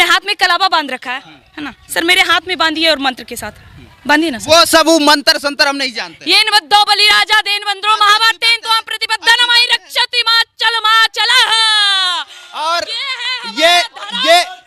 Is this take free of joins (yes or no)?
yes